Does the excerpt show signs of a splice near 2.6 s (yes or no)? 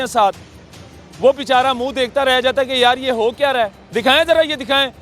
no